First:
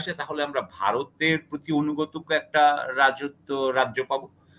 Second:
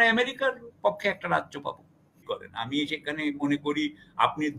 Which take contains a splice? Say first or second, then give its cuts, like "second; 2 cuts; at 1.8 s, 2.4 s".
second; 1 cut; at 2.3 s